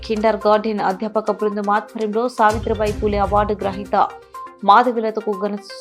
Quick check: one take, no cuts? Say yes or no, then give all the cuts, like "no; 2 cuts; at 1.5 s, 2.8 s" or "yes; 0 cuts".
yes; 0 cuts